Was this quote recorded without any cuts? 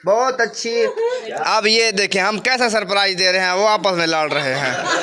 no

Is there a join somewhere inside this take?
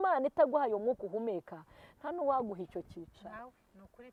no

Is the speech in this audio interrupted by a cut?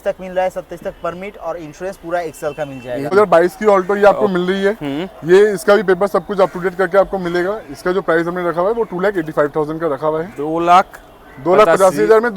yes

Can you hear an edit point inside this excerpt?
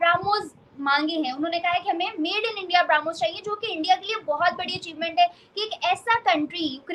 no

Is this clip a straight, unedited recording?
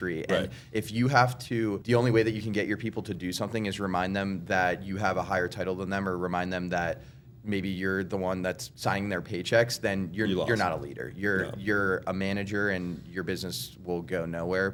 yes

